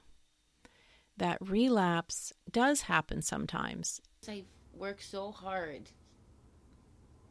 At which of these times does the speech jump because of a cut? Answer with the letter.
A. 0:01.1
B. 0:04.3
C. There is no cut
B